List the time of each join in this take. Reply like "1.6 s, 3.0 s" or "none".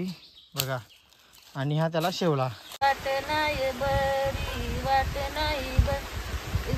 2.5 s